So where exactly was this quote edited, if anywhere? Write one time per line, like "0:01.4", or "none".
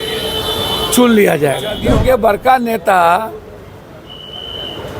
0:01.8